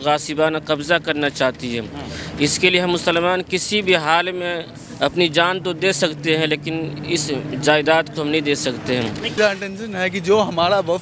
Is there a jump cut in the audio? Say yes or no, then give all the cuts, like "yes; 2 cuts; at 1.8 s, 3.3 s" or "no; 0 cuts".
yes; 1 cut; at 9.4 s